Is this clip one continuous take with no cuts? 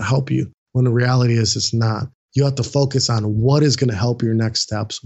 yes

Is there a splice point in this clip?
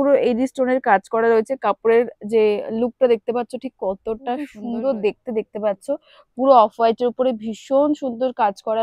yes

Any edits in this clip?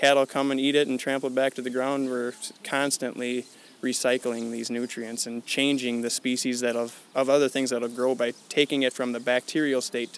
no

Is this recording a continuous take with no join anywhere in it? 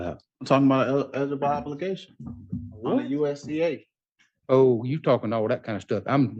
yes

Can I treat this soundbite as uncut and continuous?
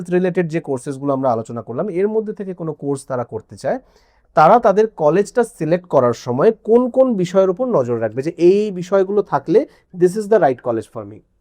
yes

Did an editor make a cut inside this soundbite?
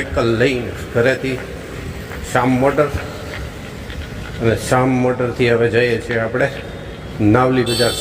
no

